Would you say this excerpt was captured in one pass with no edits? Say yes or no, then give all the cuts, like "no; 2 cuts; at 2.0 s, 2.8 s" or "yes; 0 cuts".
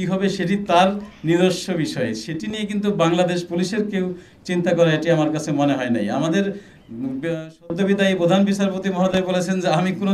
yes; 0 cuts